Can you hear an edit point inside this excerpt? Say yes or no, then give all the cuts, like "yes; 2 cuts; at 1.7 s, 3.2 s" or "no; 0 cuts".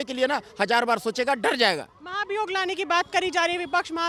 no; 0 cuts